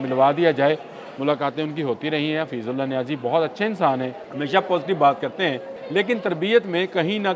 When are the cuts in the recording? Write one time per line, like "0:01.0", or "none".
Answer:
0:04.2
0:05.7